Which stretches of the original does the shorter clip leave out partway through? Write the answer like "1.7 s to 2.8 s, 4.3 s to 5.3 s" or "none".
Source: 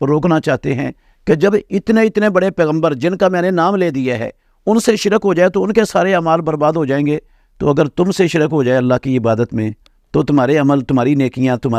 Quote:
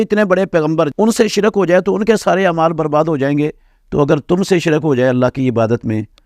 3.0 s to 4.6 s